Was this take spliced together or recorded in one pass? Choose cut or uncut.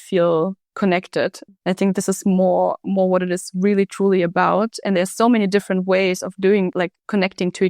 cut